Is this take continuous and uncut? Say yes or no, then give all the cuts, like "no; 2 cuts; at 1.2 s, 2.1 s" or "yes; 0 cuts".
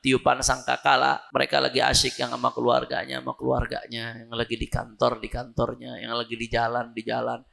no; 1 cut; at 1.2 s